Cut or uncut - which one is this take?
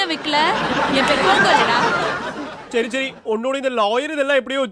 uncut